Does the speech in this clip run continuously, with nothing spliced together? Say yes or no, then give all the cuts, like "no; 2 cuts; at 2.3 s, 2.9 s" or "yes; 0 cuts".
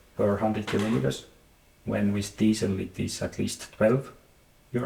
yes; 0 cuts